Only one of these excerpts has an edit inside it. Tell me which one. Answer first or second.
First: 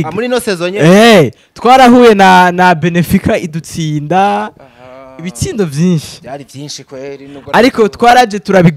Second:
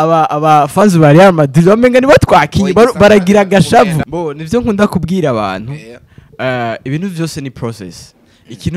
second